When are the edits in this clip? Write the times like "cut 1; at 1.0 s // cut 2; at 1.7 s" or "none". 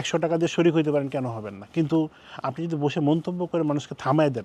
none